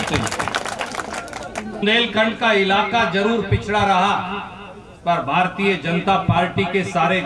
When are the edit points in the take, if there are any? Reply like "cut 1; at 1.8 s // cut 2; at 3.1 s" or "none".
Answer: cut 1; at 1.8 s